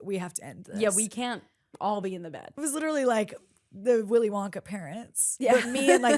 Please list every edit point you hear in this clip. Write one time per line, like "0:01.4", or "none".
0:02.6

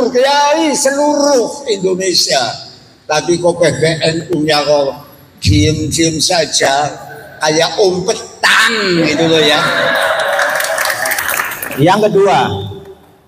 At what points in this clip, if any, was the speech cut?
0:11.2

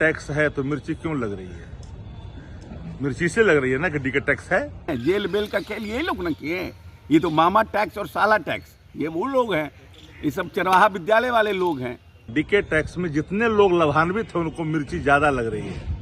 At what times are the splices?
0:04.9
0:12.1

